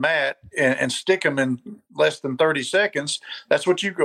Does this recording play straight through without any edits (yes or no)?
yes